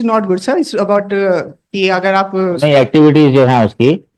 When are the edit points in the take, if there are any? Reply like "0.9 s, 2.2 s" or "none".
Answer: none